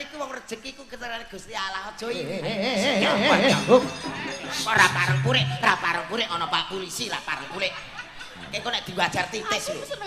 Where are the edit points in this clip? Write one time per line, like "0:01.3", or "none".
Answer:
0:02.3